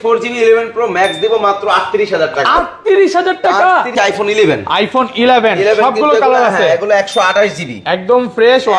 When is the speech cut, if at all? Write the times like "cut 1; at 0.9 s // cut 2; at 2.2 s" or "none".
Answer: cut 1; at 3.9 s